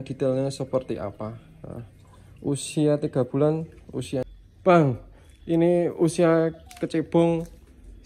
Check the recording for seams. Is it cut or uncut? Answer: cut